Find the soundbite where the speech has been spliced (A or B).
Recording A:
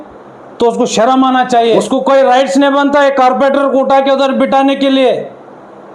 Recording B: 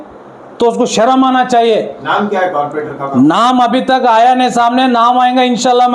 A